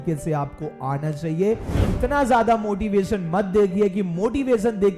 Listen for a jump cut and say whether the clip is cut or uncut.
cut